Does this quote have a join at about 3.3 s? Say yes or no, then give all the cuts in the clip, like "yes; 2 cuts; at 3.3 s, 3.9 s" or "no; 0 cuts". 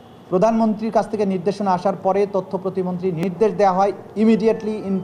yes; 1 cut; at 3.3 s